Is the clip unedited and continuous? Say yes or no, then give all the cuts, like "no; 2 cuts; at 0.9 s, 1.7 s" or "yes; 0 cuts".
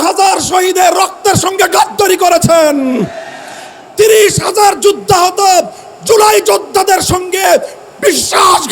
yes; 0 cuts